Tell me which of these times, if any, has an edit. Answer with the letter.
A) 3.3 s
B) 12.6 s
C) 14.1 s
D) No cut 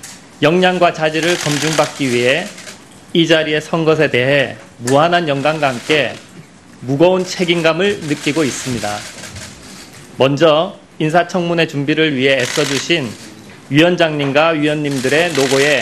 C